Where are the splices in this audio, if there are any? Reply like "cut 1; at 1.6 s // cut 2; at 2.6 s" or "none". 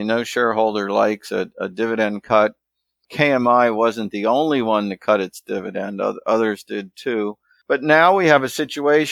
cut 1; at 7.5 s